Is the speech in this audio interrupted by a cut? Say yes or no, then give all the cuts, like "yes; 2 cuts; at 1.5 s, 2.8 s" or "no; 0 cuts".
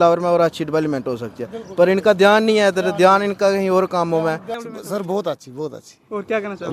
yes; 1 cut; at 4.5 s